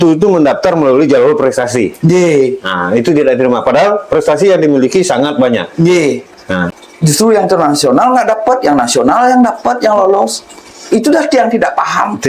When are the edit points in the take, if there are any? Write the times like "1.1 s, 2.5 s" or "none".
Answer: 6.7 s